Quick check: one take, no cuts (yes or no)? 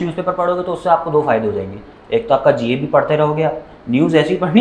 yes